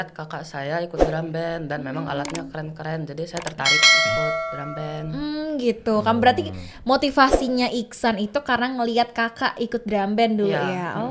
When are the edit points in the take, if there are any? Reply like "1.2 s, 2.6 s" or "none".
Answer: none